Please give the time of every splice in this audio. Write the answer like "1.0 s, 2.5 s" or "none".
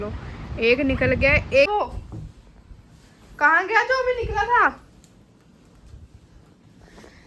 1.7 s